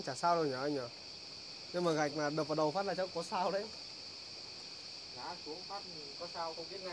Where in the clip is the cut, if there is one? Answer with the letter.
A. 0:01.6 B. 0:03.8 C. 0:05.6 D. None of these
D